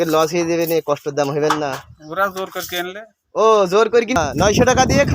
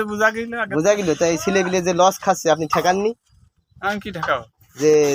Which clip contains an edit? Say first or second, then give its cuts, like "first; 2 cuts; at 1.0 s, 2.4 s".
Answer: first; 1 cut; at 4.2 s